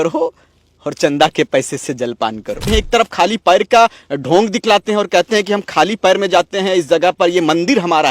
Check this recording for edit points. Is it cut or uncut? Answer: cut